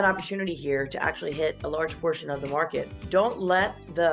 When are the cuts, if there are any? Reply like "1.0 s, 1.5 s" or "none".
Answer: 2.9 s

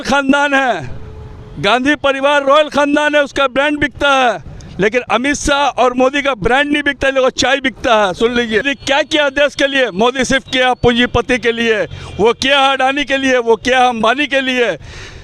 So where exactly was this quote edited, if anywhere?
8.6 s

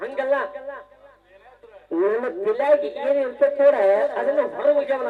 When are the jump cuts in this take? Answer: none

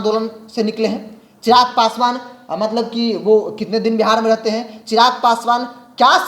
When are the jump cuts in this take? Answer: none

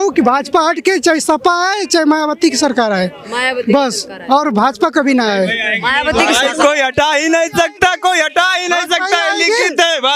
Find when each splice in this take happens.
none

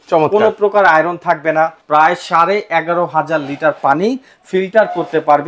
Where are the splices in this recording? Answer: 1.8 s

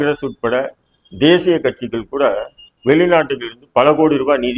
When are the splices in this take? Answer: none

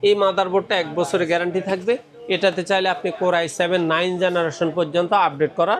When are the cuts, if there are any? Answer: none

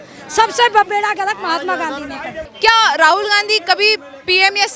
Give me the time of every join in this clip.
2.5 s

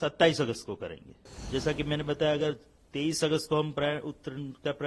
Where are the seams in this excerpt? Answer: 1.3 s

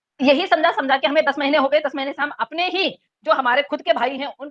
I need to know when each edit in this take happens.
none

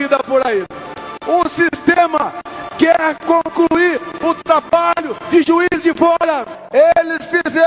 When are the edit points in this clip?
6.5 s

